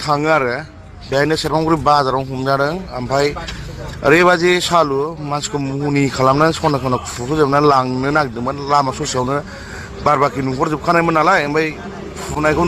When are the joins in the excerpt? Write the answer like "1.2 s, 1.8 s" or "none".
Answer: none